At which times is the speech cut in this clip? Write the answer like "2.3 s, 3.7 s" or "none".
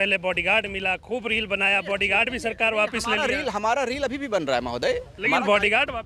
none

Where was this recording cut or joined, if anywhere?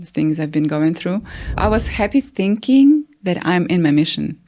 1.6 s

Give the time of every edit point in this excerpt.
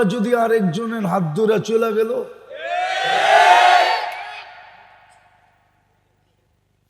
none

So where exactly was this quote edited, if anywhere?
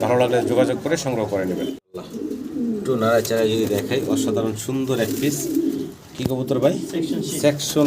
1.8 s

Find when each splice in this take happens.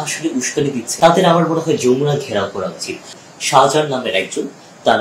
0.9 s, 3.1 s

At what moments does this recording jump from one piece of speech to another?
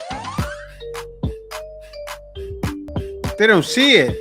2.9 s

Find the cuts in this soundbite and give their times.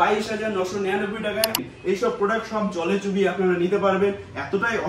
1.6 s

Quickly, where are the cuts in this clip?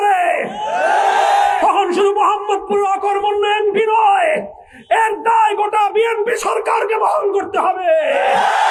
none

